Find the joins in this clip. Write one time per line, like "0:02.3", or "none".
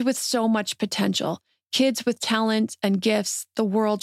none